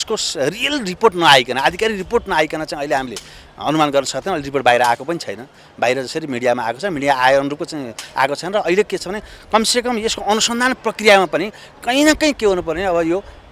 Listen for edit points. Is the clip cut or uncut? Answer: uncut